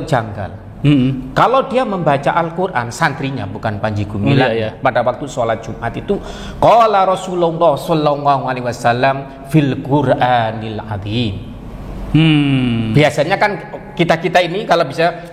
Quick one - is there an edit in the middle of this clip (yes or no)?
no